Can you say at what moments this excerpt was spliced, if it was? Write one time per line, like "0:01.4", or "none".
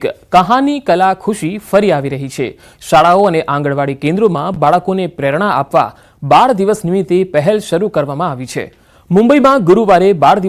0:03.3